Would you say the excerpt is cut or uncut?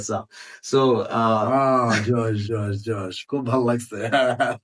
uncut